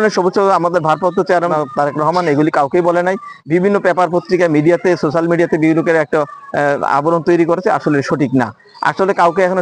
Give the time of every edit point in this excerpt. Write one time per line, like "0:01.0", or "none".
0:01.5